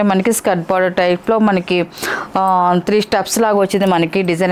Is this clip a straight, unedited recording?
yes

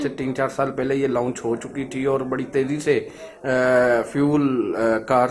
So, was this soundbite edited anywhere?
no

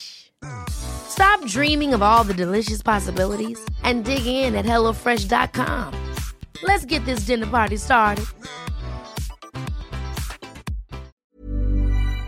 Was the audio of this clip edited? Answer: yes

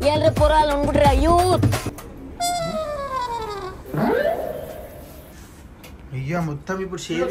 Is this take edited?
no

